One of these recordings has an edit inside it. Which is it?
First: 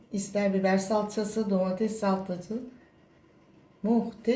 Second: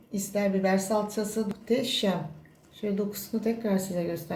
second; 1 cut; at 1.5 s

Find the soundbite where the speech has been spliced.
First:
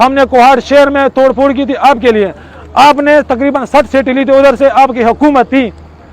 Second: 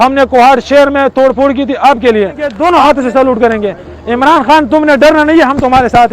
second; 1 cut; at 2.5 s

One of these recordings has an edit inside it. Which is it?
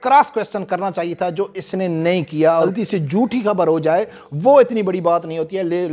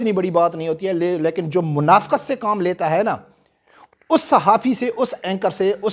first; 1 cut; at 2.7 s

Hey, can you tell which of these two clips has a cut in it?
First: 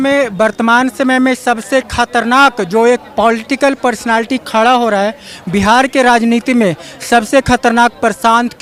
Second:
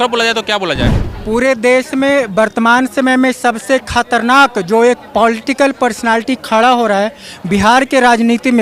second; 1 cut; at 1.1 s

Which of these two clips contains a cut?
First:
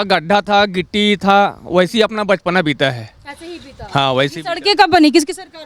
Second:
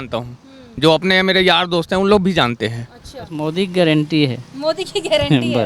second; 1 cut; at 3.4 s

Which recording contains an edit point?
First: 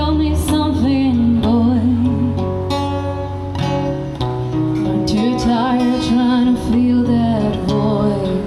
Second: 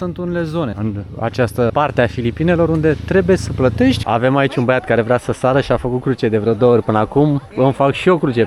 second; 4 cuts; at 0.7 s, 1.7 s, 4.0 s, 7.5 s

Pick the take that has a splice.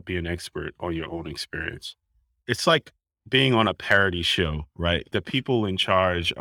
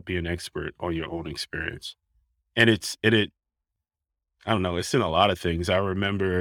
first; 2 cuts; at 2.4 s, 5.1 s

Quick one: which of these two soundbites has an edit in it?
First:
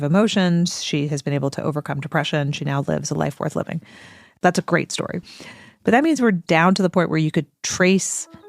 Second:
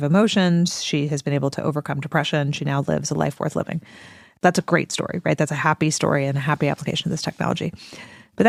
first; 1 cut; at 5.2 s

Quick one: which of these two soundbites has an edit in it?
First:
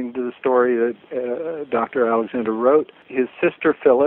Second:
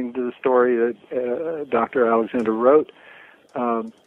first; 1 cut; at 3.0 s

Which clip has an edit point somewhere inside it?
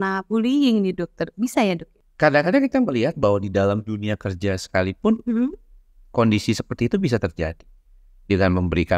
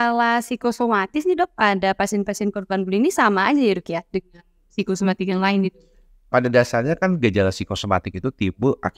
first; 1 cut; at 1.9 s

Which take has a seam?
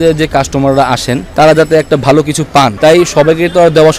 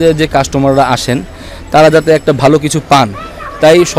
first; 2 cuts; at 1.2 s, 2.7 s

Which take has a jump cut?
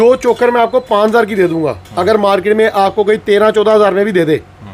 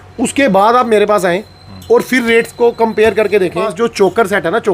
second; 1 cut; at 3.7 s

